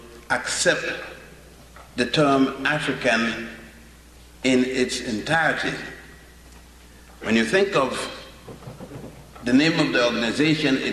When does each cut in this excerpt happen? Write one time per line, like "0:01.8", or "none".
none